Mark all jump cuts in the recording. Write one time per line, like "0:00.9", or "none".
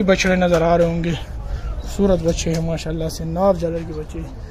none